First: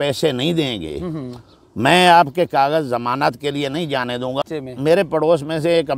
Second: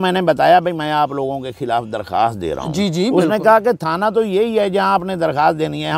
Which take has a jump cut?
first; 1 cut; at 4.4 s

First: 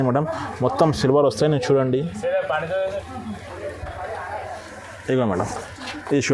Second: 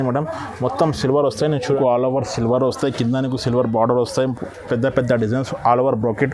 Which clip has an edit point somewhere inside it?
second; 1 cut; at 1.8 s

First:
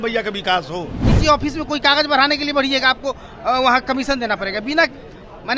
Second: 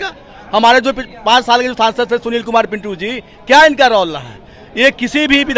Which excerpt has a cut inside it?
first; 1 cut; at 1.1 s

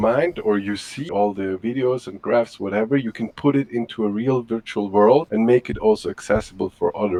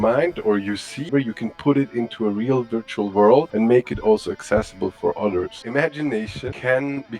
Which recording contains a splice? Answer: second; 2 cuts; at 1.1 s, 5.6 s

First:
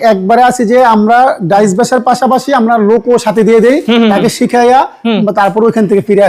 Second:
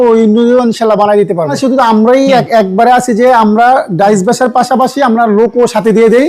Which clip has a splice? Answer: second; 1 cut; at 1.6 s

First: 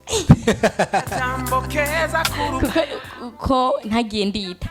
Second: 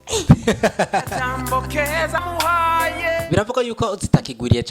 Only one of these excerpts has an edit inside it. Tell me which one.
second; 1 cut; at 2.2 s

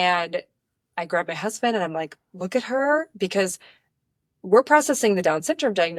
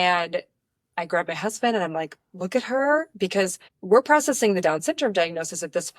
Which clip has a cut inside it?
second; 1 cut; at 3.7 s

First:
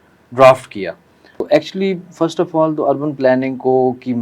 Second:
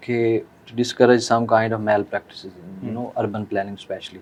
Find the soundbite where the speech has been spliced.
first; 1 cut; at 1.4 s

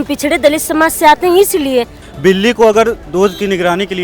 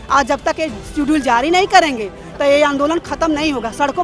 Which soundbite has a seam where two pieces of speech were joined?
first; 1 cut; at 2.0 s

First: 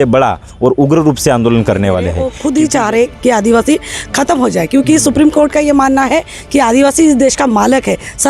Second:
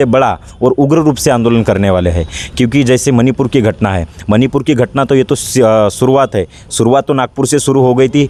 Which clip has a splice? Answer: first; 1 cut; at 2.3 s

